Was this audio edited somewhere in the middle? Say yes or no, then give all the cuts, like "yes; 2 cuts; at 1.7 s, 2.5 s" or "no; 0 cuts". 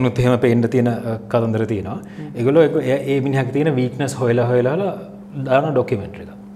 no; 0 cuts